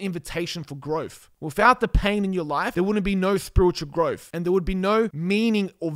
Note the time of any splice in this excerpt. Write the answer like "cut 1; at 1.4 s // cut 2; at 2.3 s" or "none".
cut 1; at 1.2 s // cut 2; at 2.7 s // cut 3; at 4.3 s // cut 4; at 5.2 s